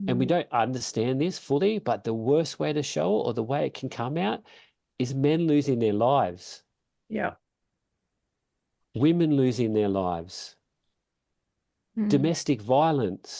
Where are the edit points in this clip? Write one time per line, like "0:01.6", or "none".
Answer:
none